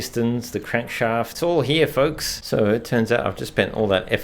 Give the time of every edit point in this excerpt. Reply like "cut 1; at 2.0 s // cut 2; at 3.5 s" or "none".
cut 1; at 1.3 s // cut 2; at 2.4 s

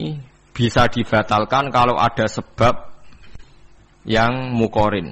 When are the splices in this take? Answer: none

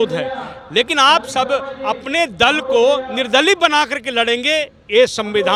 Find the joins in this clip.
none

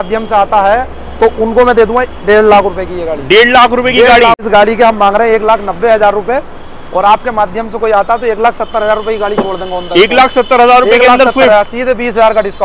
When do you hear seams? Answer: cut 1; at 4.4 s

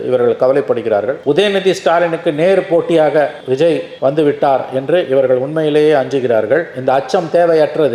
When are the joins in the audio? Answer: none

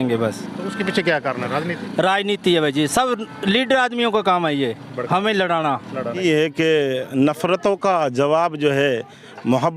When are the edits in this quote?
cut 1; at 6.2 s

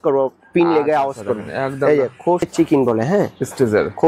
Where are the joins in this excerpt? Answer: cut 1; at 2.5 s

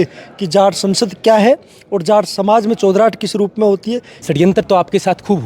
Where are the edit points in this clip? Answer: cut 1; at 4.2 s

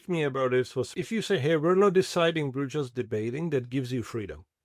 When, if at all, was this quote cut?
cut 1; at 0.9 s

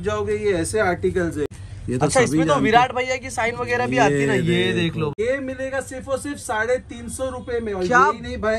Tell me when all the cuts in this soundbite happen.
cut 1; at 1.5 s // cut 2; at 5.1 s

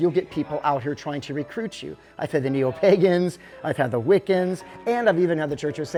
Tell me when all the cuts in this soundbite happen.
none

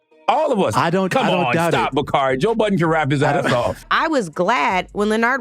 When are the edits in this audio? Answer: cut 1; at 3.8 s

